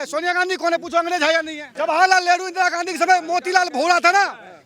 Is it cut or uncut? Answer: cut